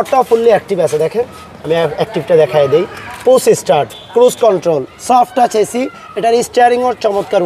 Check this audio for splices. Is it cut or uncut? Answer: uncut